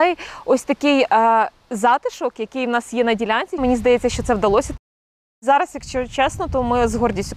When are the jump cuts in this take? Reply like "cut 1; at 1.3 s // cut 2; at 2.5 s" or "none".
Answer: cut 1; at 3.6 s // cut 2; at 5.0 s